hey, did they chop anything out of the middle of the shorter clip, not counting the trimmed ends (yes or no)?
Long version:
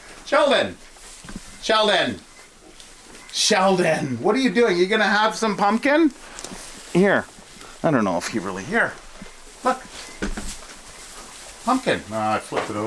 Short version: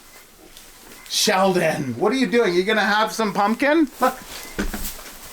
yes